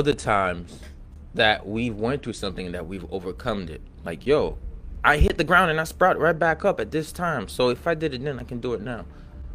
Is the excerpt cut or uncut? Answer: uncut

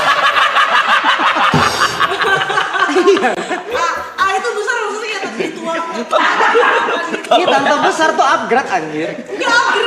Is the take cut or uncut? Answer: uncut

